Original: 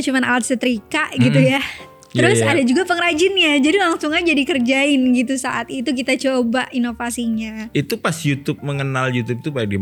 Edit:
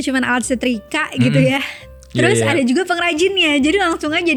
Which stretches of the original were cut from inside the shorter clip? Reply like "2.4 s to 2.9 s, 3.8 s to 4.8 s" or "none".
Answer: none